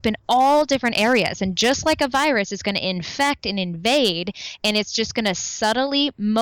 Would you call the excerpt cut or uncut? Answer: uncut